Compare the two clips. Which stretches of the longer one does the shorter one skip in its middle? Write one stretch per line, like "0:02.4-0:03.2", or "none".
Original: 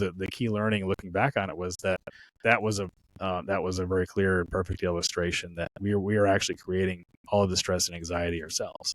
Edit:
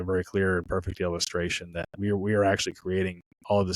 none